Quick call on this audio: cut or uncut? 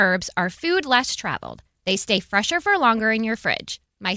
uncut